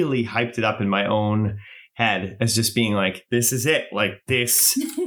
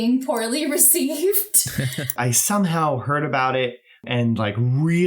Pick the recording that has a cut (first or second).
second